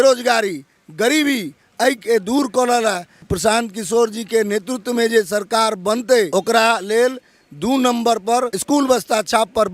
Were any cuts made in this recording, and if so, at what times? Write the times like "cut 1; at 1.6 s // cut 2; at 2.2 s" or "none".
cut 1; at 3.2 s // cut 2; at 6.3 s // cut 3; at 8.6 s